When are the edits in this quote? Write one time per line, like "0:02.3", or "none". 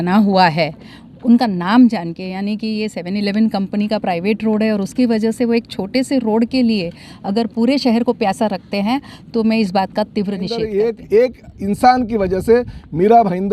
0:10.5